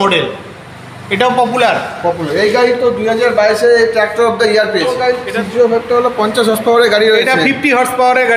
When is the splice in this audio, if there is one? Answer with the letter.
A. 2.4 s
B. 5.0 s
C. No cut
B